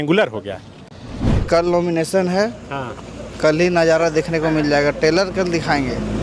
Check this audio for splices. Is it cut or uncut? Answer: cut